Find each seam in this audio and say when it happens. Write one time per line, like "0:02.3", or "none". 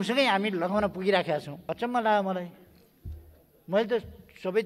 0:01.5